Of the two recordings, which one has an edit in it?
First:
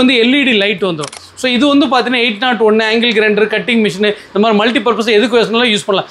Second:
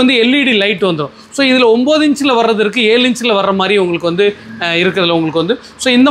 first; 1 cut; at 1.2 s

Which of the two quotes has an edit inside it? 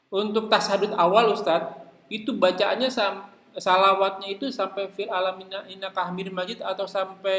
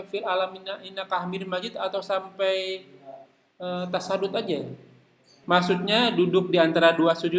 second; 1 cut; at 5.3 s

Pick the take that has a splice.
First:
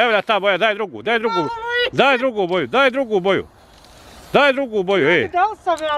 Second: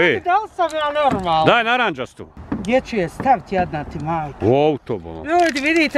second; 1 cut; at 2.1 s

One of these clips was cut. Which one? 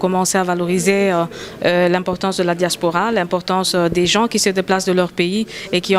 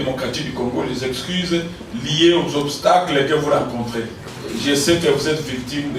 second; 1 cut; at 4.2 s

